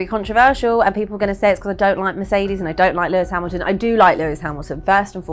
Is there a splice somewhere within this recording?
no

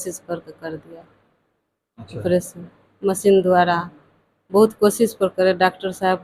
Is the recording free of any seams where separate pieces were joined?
yes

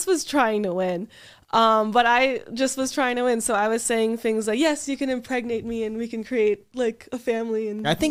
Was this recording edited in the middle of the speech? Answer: no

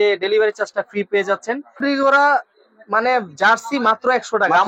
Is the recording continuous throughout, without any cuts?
no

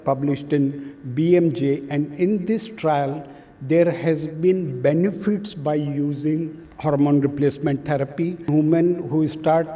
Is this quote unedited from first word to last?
no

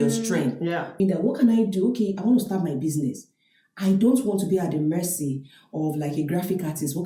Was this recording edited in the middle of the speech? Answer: yes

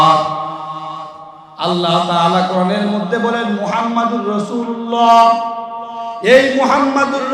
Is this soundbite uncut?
yes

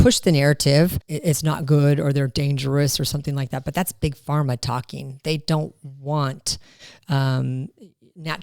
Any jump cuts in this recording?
yes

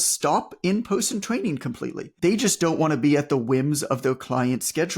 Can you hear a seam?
yes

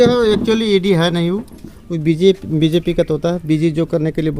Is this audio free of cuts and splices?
yes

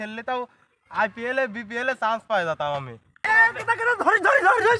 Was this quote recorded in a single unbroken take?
no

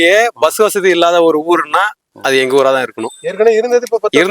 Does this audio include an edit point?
no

